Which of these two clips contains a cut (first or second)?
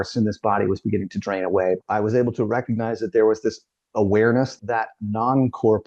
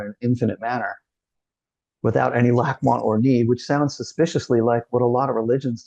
first